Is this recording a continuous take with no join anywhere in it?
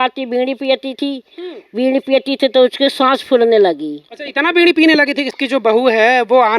no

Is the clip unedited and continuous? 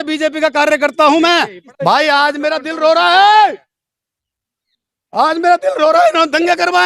no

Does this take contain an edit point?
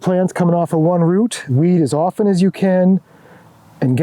yes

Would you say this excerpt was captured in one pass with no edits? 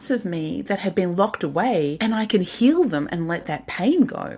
no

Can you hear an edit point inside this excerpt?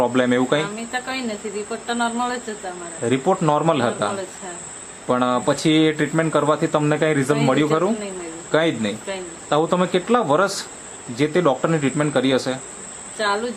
no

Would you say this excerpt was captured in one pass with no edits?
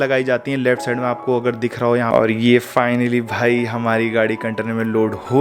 no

